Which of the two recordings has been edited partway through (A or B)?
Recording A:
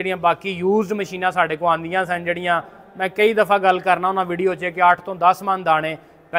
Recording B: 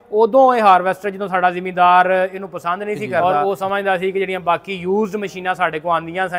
B